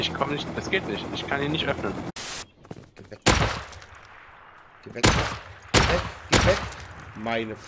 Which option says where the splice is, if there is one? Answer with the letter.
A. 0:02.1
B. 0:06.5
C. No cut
A